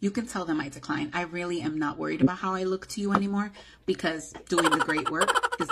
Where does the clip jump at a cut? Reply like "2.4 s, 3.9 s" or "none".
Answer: none